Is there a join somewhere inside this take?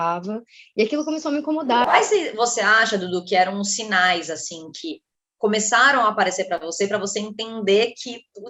yes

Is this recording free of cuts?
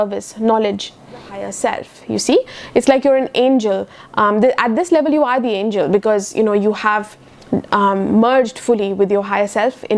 no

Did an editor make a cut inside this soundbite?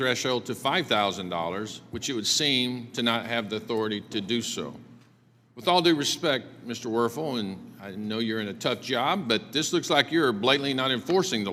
no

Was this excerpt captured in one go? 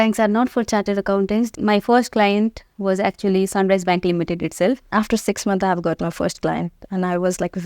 no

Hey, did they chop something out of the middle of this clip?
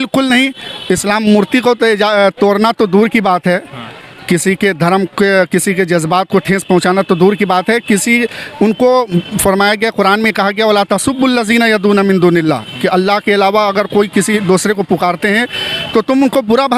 no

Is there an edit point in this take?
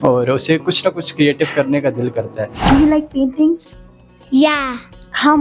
yes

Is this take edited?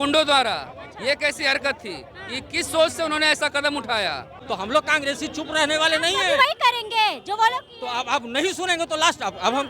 yes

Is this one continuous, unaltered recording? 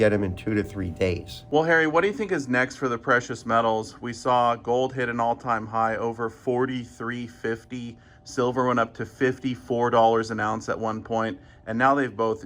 no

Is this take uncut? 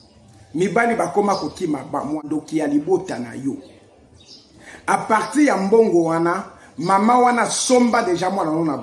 no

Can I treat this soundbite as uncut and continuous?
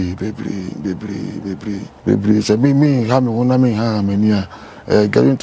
no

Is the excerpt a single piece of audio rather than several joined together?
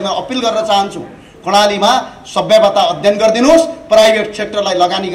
yes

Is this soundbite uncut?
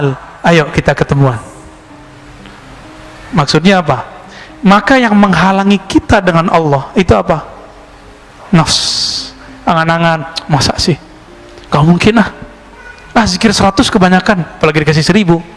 yes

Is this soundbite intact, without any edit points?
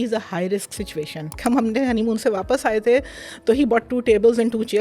no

